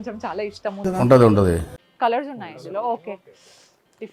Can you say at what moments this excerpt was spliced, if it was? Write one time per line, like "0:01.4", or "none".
0:01.8